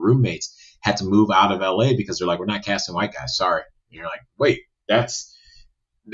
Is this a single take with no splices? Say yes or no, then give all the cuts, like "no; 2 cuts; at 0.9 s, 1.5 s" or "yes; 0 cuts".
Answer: yes; 0 cuts